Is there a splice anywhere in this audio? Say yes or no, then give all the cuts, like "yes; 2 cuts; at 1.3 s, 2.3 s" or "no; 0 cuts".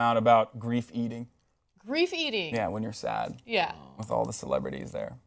no; 0 cuts